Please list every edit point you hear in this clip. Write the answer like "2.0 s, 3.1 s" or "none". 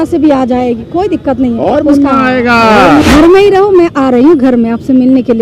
3.0 s